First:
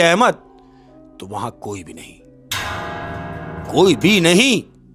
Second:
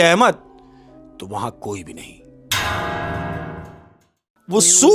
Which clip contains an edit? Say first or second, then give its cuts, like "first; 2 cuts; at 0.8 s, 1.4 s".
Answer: second; 1 cut; at 3.7 s